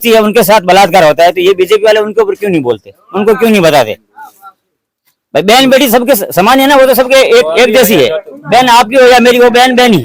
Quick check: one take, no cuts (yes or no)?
yes